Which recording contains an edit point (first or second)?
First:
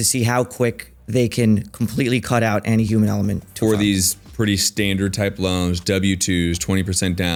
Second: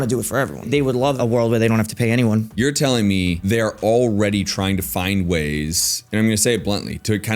second